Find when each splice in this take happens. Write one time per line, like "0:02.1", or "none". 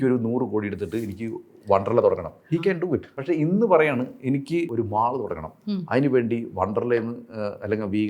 0:03.1
0:04.7